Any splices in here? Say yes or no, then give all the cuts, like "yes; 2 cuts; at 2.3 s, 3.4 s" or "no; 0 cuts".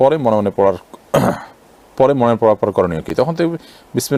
no; 0 cuts